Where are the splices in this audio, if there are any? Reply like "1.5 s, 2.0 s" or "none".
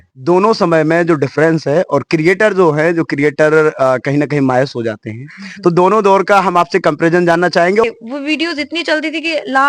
7.8 s